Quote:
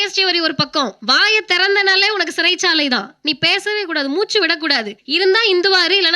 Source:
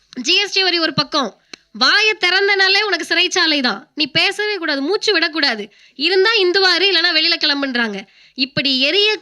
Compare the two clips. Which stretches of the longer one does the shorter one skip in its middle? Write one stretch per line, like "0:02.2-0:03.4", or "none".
0:01.4-0:01.7
0:05.7-0:05.9